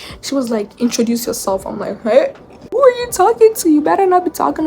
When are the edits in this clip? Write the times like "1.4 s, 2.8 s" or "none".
2.8 s